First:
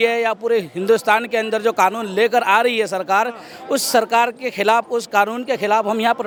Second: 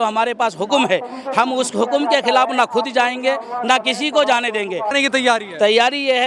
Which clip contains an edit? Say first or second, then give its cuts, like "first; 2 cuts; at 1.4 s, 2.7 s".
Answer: second; 1 cut; at 4.9 s